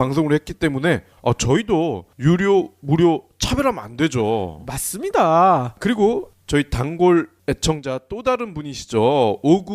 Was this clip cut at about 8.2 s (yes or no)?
no